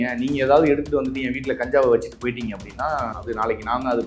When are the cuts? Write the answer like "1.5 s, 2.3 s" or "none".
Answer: 3.2 s

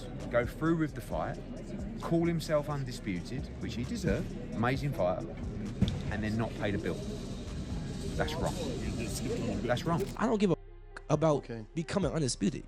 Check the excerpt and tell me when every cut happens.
10.1 s

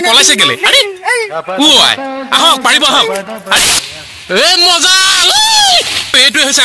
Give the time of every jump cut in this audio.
3.6 s

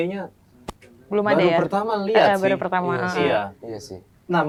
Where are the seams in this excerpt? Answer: none

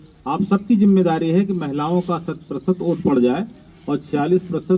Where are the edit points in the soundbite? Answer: none

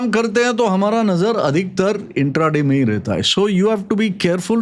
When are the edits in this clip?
none

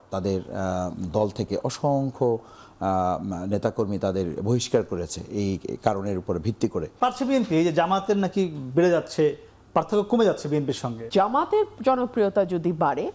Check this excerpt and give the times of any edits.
6.9 s, 10.9 s

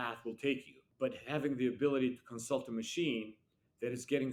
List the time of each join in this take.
none

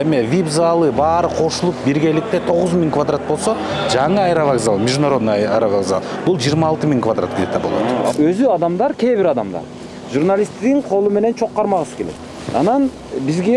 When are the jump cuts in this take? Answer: 8.1 s

